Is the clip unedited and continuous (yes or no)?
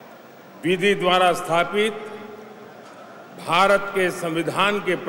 yes